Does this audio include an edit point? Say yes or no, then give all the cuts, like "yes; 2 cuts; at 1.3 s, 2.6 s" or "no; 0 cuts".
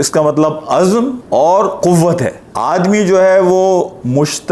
yes; 1 cut; at 2.4 s